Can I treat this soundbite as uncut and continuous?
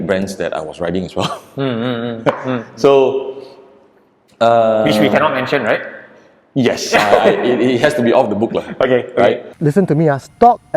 yes; 0 cuts

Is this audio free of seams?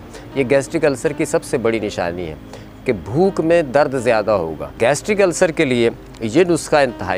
no; 1 cut; at 4.8 s

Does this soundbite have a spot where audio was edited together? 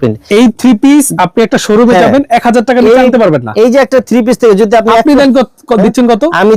no; 0 cuts

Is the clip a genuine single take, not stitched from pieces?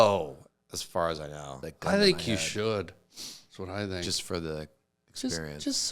no; 1 cut; at 1.6 s

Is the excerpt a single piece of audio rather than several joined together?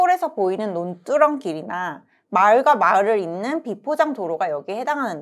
yes; 0 cuts

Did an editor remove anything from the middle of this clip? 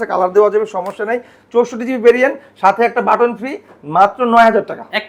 no; 0 cuts

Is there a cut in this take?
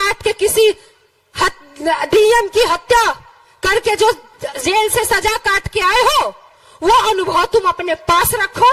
no; 0 cuts

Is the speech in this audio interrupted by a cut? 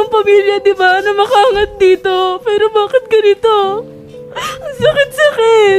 no; 0 cuts

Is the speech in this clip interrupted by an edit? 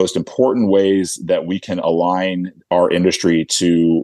no; 0 cuts

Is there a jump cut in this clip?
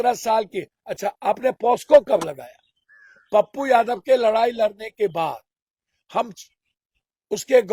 no; 0 cuts

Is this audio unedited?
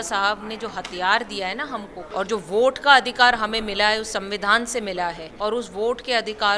no; 2 cuts; at 2.0 s, 5.3 s

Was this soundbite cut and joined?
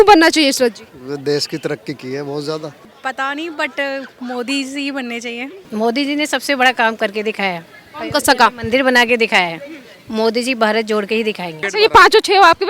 yes; 3 cuts; at 2.8 s, 5.6 s, 11.7 s

